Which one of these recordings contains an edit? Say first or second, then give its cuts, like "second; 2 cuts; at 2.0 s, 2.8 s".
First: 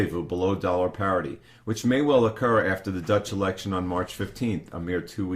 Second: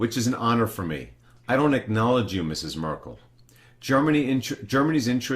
second; 1 cut; at 4.4 s